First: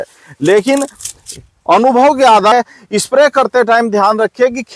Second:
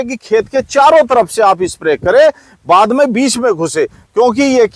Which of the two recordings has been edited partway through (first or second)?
first